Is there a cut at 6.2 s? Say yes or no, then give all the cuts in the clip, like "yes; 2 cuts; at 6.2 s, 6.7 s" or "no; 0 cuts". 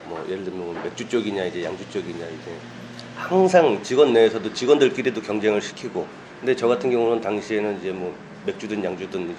yes; 1 cut; at 6.2 s